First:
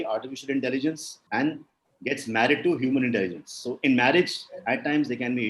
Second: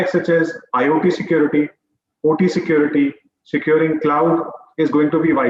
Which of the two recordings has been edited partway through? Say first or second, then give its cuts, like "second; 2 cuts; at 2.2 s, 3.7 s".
first; 1 cut; at 1.1 s